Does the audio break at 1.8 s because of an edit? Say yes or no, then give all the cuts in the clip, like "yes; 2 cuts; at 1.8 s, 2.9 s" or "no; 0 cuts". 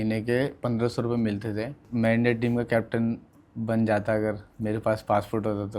yes; 1 cut; at 1.8 s